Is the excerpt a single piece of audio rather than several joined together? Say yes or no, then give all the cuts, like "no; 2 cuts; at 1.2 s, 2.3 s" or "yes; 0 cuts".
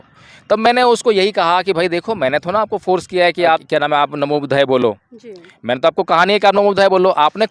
yes; 0 cuts